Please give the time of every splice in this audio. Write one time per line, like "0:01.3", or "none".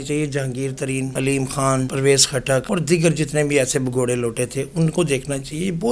0:01.1
0:01.9
0:02.7